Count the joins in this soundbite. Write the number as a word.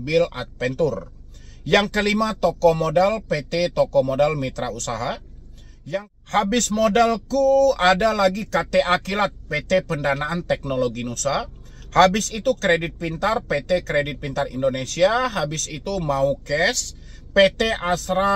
one